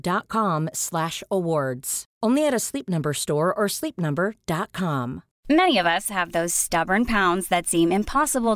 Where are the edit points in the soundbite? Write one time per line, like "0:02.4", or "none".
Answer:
0:05.3